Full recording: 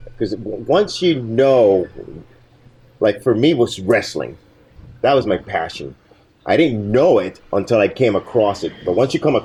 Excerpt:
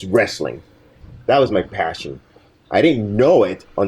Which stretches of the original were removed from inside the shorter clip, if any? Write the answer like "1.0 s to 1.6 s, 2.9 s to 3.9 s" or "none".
none